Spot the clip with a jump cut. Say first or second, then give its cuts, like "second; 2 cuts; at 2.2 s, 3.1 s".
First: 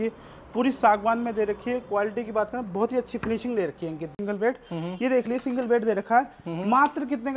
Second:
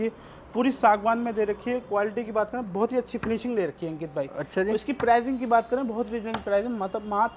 first; 1 cut; at 4.1 s